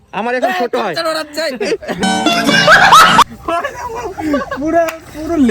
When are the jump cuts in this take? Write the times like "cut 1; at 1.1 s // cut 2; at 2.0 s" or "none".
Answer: cut 1; at 2.0 s // cut 2; at 3.2 s // cut 3; at 4.5 s